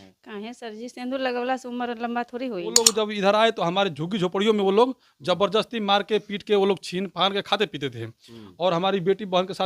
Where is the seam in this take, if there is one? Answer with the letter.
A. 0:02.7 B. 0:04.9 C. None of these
A